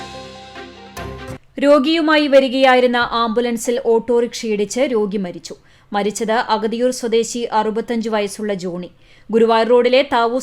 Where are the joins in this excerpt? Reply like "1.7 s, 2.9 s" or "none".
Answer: none